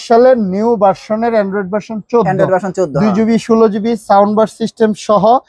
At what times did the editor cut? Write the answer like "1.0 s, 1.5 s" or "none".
none